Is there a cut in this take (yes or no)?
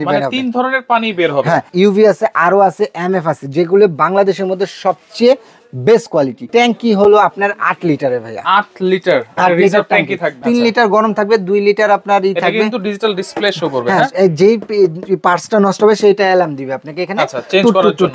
yes